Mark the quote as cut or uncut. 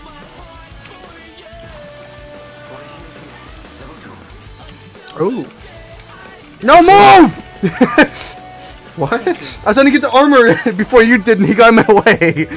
uncut